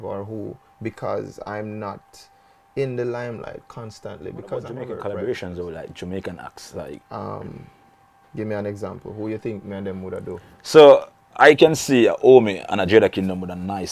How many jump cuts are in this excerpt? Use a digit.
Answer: 1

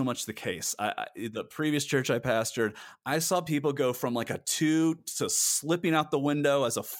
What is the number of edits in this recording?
1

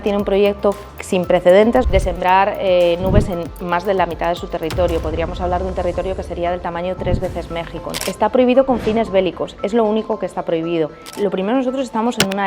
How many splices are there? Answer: 3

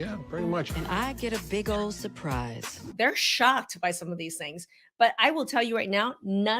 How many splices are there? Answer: 1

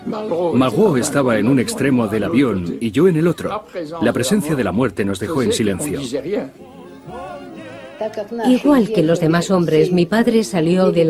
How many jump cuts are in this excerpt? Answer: 1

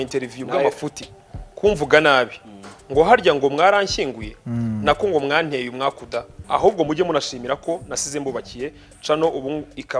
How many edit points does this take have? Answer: 1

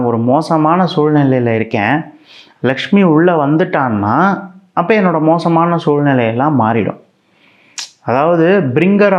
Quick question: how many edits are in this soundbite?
0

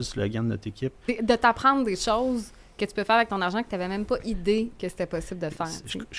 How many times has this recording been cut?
1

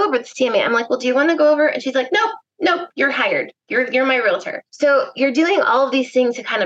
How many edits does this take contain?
1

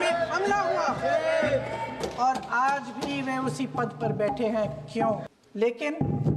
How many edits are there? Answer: 1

